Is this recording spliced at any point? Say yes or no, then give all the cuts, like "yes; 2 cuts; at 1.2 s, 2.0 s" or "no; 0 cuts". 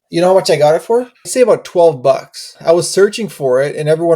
yes; 2 cuts; at 1.3 s, 2.5 s